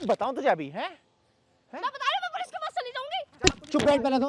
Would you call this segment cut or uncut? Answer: uncut